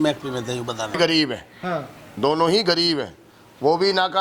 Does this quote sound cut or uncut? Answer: cut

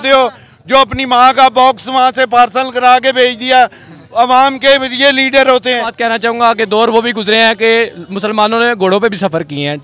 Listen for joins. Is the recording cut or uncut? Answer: cut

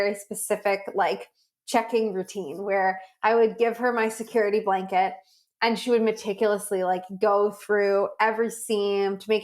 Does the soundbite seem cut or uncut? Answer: uncut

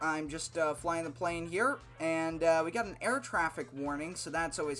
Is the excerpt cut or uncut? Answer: uncut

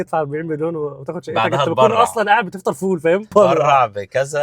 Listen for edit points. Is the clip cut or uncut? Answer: cut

